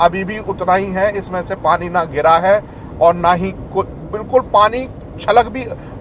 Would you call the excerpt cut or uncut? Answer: uncut